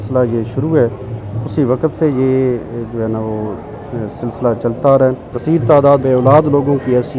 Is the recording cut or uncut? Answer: cut